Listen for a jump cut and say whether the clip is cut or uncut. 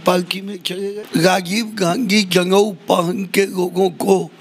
cut